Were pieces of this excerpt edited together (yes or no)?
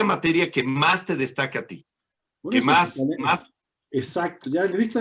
no